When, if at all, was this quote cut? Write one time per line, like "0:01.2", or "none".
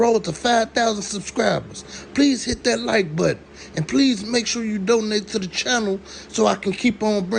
none